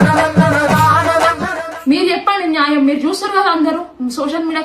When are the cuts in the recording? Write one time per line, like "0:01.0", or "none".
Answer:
0:01.7